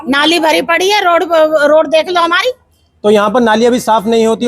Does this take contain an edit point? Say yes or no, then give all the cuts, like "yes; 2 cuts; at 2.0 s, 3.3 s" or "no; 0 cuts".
no; 0 cuts